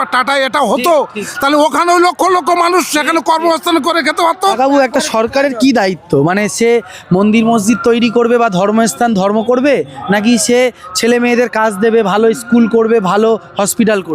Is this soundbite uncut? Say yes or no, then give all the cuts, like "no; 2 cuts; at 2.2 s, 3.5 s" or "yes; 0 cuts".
no; 1 cut; at 4.6 s